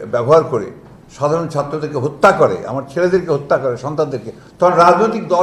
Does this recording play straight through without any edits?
yes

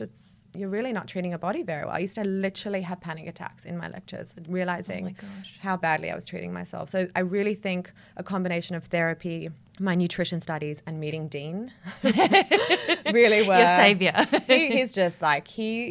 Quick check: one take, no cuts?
yes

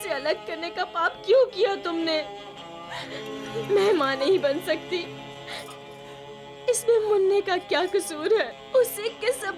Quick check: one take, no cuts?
no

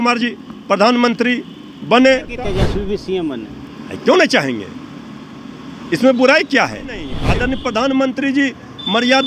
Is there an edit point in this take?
yes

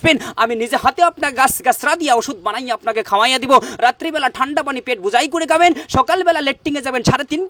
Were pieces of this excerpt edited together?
no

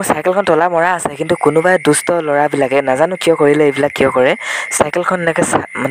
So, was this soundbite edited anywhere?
no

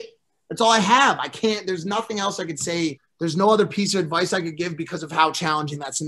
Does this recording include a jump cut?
yes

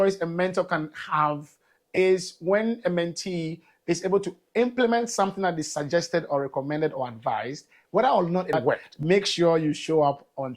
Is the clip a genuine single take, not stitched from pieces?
no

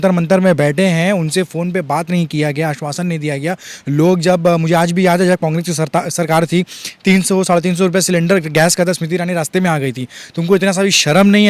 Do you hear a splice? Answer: no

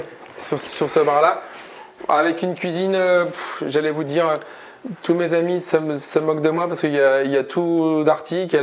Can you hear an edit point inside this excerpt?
no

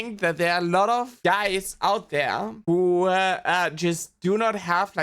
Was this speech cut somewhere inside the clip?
yes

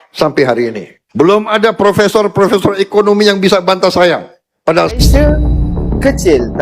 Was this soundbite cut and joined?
yes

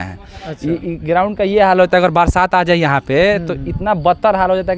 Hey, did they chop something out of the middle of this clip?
no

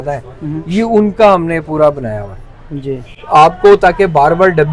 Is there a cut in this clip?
no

